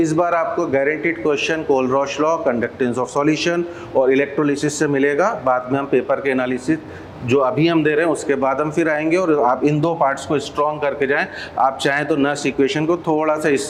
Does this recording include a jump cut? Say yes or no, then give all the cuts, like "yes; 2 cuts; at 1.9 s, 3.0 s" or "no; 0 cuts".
no; 0 cuts